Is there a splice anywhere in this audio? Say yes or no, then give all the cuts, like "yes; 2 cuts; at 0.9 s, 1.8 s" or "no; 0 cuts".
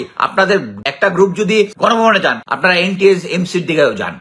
yes; 3 cuts; at 0.8 s, 1.7 s, 2.5 s